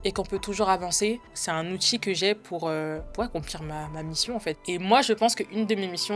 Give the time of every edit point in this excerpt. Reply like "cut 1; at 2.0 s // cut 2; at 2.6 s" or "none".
cut 1; at 1.4 s // cut 2; at 3.1 s // cut 3; at 4.6 s